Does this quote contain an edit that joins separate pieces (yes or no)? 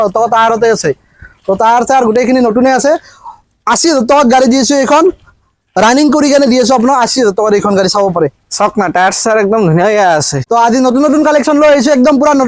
yes